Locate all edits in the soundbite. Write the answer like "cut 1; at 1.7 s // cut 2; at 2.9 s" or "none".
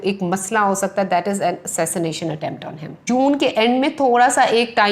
cut 1; at 3.0 s